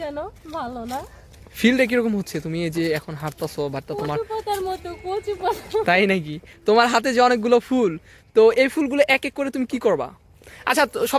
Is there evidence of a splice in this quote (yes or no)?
no